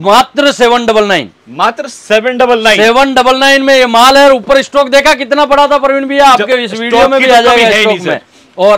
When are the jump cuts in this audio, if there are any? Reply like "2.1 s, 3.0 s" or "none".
none